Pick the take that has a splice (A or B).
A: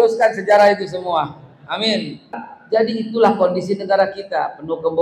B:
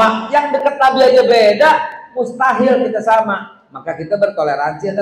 A